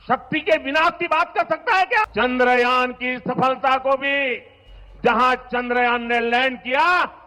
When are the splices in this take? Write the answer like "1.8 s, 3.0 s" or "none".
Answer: 2.1 s

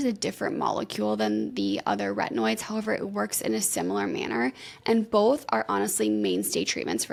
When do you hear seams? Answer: none

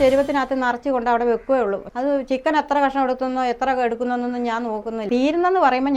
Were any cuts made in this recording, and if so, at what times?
1.9 s, 5.1 s

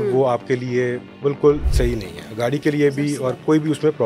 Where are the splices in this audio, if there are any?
1.7 s

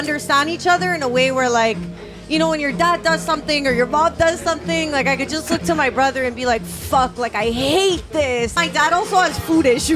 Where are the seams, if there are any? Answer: 8.5 s

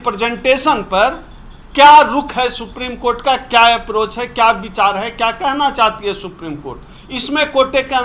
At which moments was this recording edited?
none

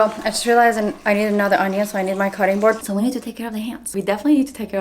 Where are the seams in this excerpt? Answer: 2.8 s

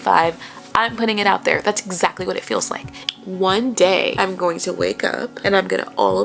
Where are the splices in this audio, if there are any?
2.9 s, 4.1 s, 5.3 s

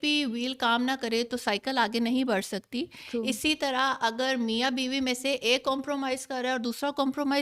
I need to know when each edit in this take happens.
none

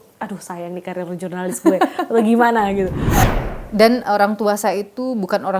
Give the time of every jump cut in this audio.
3.2 s

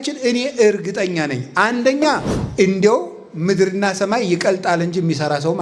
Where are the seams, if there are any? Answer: 2.4 s

